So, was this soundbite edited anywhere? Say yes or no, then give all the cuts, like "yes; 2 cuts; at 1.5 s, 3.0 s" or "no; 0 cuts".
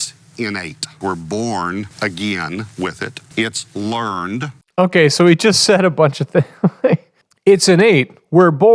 no; 0 cuts